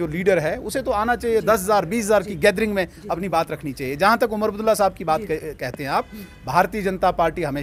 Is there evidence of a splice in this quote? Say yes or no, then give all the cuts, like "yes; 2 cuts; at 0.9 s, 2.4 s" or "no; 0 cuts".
no; 0 cuts